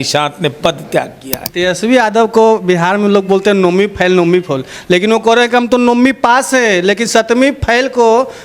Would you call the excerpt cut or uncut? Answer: cut